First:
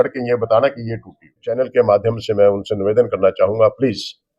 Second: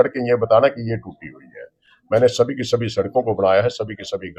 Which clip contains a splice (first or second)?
first